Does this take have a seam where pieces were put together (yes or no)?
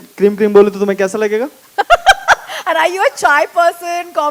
no